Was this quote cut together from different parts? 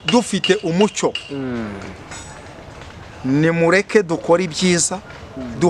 no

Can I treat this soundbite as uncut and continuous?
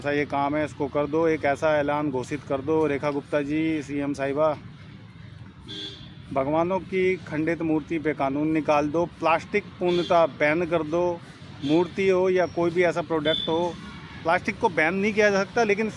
yes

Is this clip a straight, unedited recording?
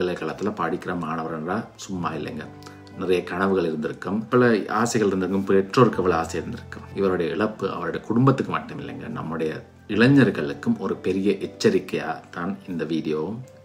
yes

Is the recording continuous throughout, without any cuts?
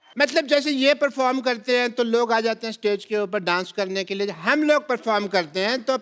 yes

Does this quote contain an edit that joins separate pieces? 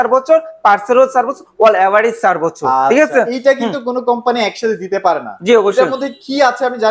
no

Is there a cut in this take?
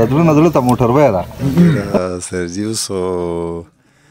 yes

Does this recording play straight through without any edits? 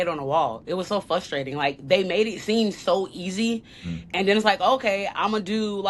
yes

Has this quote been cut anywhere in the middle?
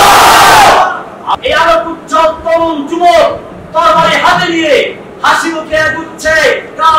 yes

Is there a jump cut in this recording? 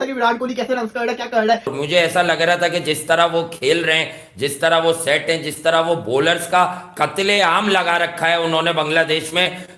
yes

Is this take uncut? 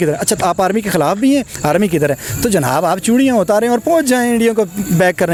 yes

